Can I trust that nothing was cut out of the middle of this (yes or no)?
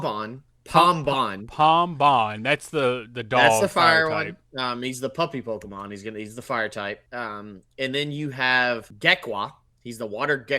no